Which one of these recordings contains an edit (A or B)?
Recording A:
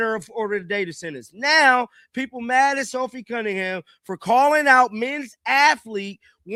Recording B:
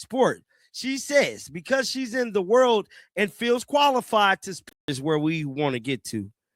B